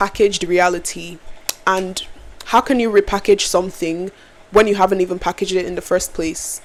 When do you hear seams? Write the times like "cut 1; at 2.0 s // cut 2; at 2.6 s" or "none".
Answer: none